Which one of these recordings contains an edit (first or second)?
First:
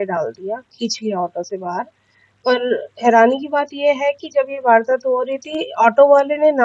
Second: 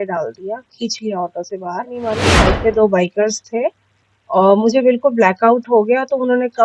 second